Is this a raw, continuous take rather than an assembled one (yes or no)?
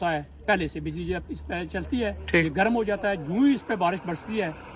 yes